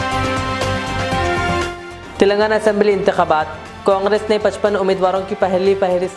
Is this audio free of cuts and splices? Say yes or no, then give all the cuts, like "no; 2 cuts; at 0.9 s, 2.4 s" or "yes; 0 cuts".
yes; 0 cuts